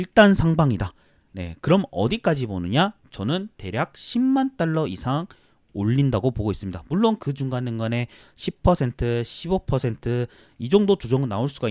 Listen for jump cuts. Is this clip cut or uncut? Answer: uncut